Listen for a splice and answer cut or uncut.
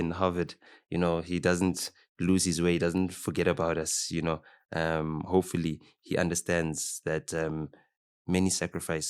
uncut